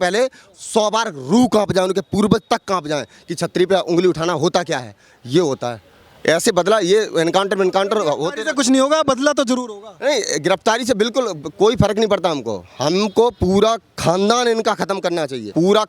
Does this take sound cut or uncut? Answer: uncut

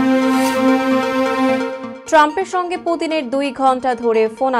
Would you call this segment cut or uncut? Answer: cut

